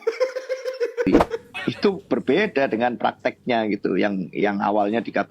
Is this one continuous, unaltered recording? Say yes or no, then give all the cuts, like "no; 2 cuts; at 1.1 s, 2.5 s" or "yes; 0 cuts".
no; 1 cut; at 1.1 s